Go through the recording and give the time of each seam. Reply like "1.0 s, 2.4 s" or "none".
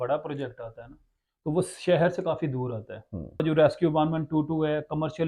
3.4 s